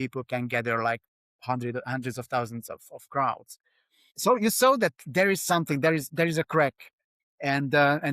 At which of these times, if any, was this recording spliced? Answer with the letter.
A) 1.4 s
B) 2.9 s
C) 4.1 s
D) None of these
C